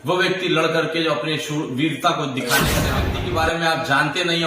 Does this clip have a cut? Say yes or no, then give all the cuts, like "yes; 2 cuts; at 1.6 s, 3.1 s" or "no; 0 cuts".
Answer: yes; 1 cut; at 2.9 s